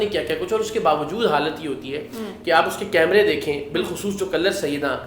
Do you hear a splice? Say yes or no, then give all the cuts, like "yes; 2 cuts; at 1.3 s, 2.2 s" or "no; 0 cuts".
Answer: no; 0 cuts